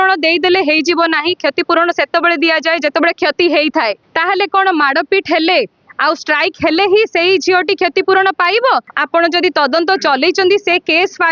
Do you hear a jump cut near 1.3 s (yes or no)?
no